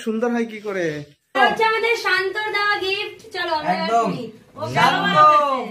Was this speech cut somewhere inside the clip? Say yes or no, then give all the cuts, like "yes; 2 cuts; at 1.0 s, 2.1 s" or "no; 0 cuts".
yes; 1 cut; at 1.4 s